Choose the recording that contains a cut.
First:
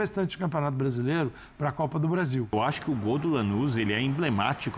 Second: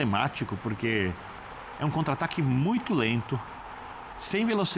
first; 1 cut; at 2.5 s

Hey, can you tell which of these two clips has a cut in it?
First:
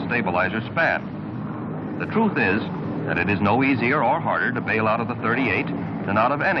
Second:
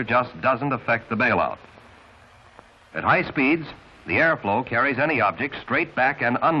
first; 1 cut; at 5.1 s

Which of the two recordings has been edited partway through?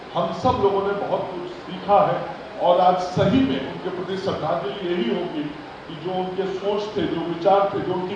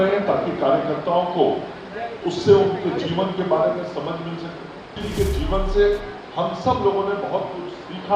second; 1 cut; at 5.0 s

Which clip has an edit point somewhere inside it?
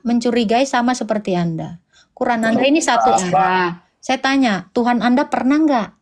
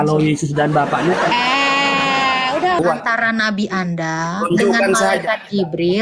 second; 1 cut; at 2.8 s

